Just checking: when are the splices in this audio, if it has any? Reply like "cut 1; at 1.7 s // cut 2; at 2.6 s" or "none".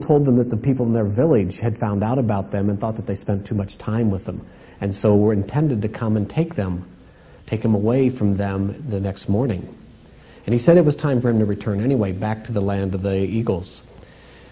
cut 1; at 3.5 s